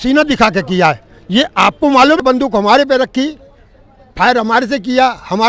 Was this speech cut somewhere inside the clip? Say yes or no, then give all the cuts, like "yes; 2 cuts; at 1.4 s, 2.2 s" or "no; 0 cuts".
yes; 1 cut; at 2.2 s